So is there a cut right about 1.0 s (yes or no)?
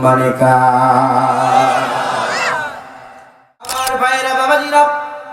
no